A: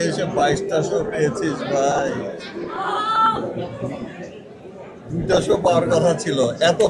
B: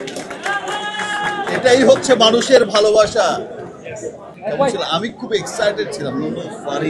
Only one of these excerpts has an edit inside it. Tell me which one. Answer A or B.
B